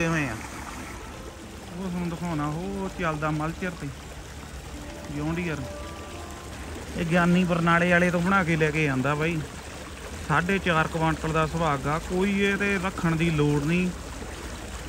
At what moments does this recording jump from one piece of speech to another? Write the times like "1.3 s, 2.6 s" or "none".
1.0 s, 6.5 s